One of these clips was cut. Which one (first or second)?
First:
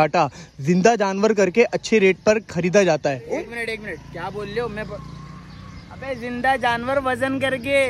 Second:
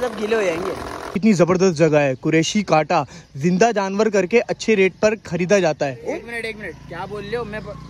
second